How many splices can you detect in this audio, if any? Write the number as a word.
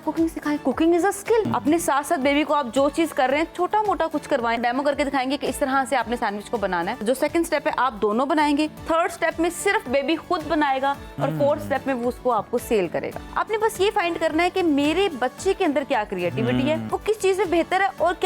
six